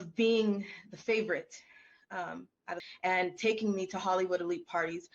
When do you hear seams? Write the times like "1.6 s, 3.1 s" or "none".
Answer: 2.8 s